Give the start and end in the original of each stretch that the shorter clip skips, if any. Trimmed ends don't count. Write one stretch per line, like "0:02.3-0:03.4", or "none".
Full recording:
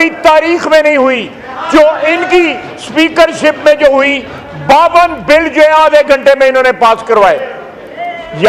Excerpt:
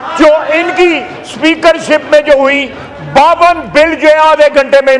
none